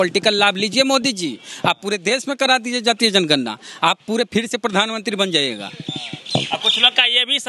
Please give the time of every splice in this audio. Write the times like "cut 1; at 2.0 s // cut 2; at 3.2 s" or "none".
none